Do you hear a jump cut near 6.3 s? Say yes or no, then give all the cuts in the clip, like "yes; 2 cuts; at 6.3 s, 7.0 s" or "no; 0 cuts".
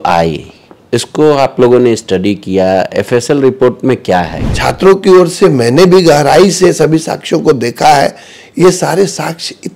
no; 1 cut; at 4.4 s